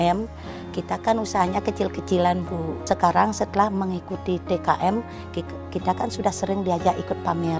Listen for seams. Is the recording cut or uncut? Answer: cut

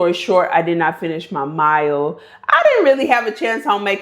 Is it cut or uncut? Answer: uncut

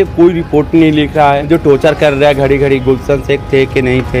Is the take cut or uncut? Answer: cut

